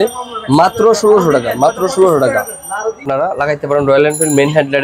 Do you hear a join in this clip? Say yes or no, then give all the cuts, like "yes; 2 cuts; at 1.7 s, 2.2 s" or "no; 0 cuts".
yes; 1 cut; at 3.0 s